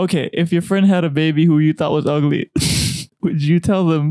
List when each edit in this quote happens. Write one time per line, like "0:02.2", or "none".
0:03.0